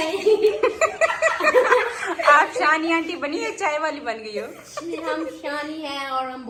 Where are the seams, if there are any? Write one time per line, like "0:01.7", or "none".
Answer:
none